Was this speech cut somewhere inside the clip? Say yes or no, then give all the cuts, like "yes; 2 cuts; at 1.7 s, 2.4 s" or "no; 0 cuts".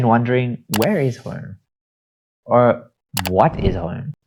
no; 0 cuts